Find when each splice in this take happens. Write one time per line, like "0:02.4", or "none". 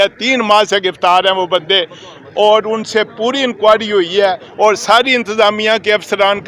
none